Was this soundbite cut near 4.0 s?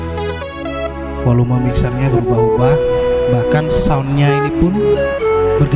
no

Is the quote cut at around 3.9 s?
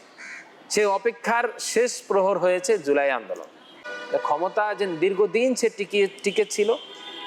yes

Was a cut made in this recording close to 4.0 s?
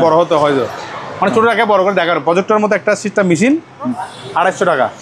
yes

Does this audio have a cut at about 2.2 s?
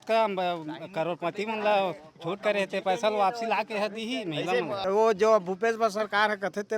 no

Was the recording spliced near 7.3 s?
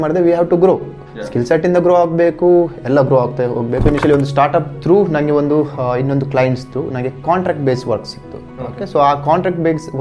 no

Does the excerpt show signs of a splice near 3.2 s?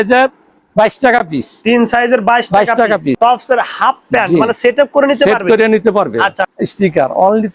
yes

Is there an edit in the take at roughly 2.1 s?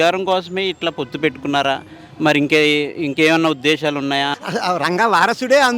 no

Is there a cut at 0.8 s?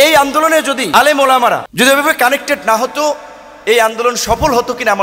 yes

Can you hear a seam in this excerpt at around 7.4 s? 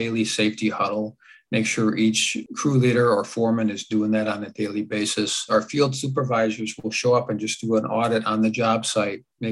no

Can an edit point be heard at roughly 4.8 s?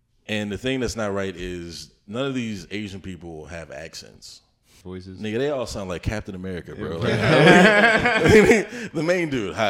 yes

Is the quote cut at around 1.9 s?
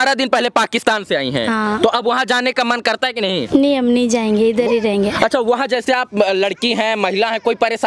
no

